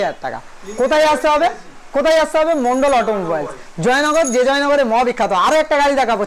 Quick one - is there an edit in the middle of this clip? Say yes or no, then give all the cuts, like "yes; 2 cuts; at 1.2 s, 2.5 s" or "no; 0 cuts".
no; 0 cuts